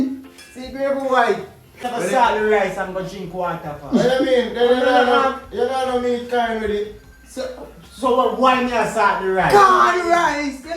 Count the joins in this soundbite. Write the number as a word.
one